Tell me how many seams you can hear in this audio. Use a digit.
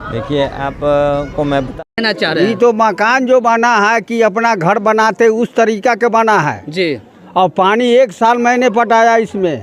1